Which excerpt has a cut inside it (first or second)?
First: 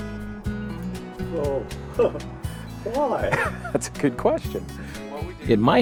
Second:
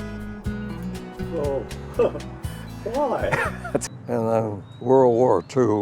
second